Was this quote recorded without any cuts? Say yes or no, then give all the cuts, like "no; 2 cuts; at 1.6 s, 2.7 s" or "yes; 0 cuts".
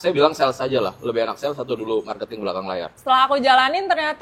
no; 1 cut; at 2.9 s